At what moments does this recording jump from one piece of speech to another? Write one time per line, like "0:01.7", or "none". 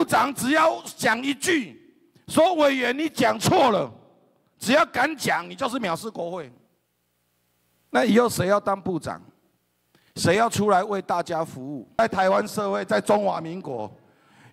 0:12.0